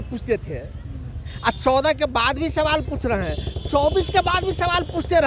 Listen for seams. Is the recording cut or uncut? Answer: uncut